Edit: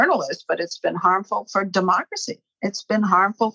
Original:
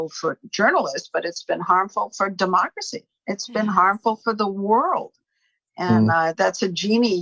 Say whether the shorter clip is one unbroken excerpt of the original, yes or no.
yes